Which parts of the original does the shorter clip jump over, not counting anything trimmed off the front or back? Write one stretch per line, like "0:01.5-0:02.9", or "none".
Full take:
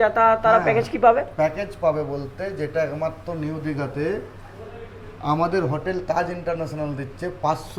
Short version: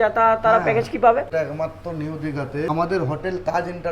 0:01.3-0:02.7
0:04.1-0:05.3